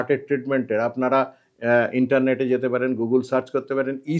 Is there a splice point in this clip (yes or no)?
no